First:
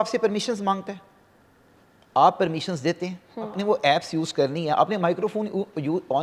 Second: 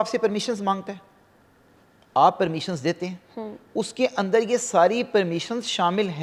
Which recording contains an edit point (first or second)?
first